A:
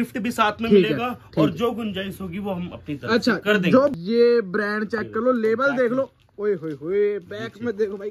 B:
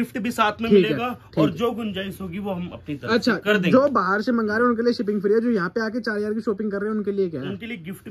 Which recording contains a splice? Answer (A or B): A